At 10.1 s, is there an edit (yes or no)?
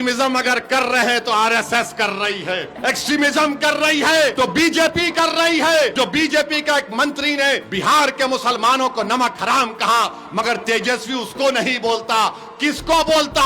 no